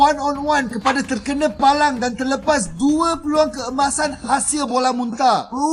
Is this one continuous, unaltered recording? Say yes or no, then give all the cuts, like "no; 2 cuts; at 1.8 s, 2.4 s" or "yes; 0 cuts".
yes; 0 cuts